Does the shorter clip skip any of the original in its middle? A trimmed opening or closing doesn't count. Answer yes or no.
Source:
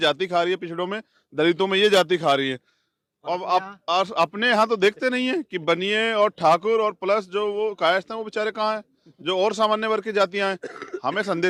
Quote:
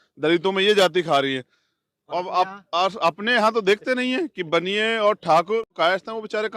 yes